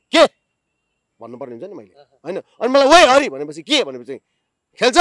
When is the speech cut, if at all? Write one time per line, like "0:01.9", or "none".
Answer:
none

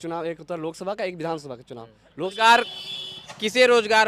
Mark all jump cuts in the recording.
0:02.3

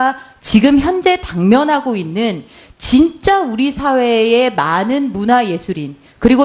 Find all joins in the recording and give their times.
none

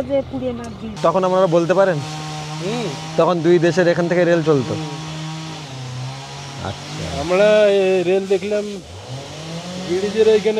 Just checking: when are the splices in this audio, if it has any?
0:00.9

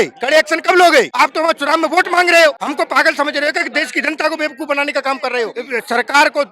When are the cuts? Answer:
0:01.1
0:02.6
0:05.6

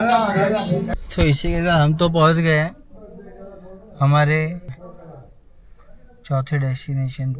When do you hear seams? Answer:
0:00.9
0:04.7

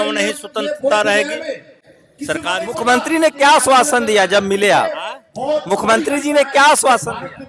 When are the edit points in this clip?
none

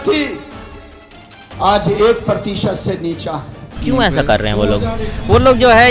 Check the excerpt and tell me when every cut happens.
0:03.8

